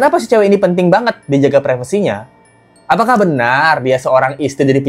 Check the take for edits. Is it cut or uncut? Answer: uncut